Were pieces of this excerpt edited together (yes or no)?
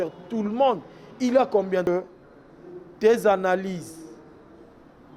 yes